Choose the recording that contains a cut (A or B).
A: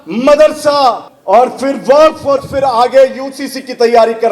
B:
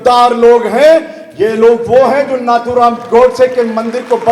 A